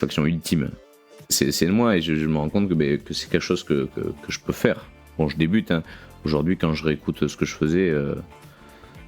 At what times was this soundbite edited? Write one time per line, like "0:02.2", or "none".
0:01.2